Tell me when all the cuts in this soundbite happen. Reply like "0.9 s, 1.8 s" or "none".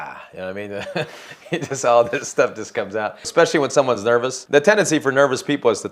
3.2 s, 4.4 s